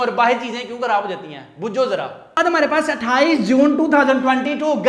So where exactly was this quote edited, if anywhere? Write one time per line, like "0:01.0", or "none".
0:02.3